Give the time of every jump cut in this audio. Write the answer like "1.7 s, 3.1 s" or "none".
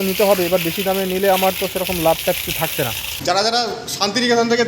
3.1 s